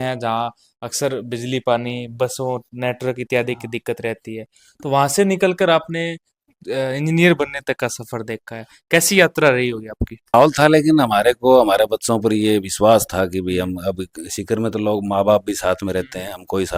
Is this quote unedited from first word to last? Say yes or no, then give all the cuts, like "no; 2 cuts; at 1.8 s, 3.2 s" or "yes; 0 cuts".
no; 1 cut; at 10.3 s